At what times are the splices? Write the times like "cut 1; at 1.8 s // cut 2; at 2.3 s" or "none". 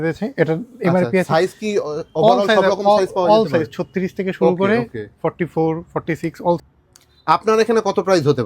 cut 1; at 6.6 s